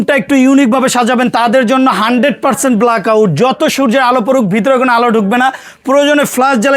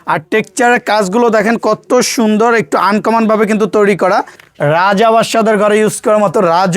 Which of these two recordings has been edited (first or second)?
second